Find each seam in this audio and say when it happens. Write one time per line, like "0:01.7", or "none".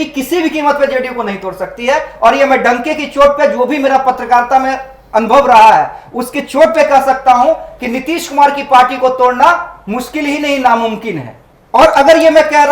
none

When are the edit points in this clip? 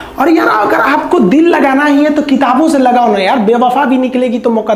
none

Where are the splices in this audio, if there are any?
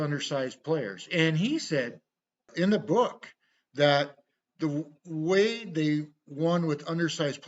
0:02.5

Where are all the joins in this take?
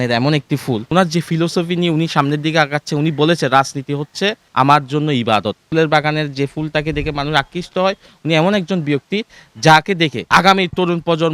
0:00.9
0:04.4
0:05.7
0:10.2

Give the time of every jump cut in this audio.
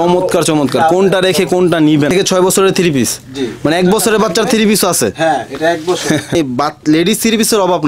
0:02.1
0:06.3

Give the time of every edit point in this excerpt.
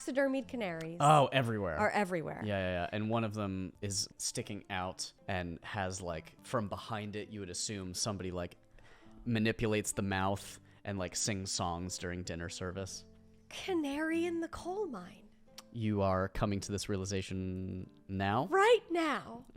0:03.8
0:05.1
0:06.3

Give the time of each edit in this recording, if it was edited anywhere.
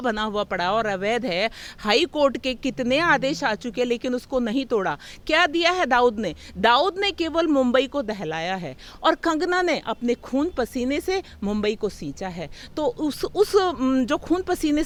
none

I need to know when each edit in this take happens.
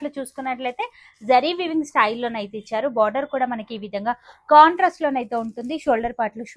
none

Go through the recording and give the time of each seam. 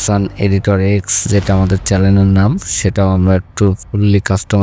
none

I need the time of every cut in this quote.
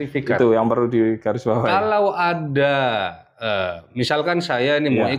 none

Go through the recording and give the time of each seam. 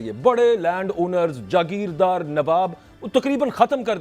none

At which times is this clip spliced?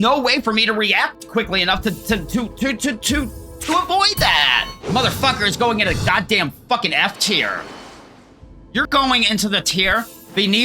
0:04.7

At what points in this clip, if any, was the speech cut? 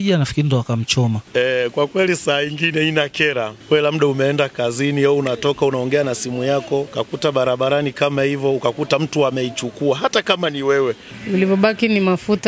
0:01.2
0:03.5
0:06.9
0:11.1

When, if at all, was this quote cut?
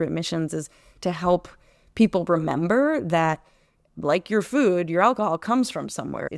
none

